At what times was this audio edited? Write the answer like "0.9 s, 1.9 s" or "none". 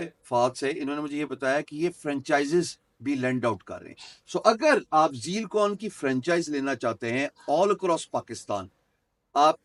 none